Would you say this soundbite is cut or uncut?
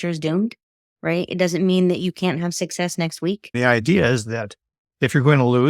cut